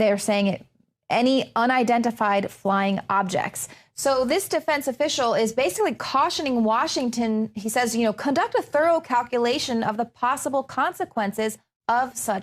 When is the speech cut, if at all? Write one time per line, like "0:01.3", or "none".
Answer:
0:07.0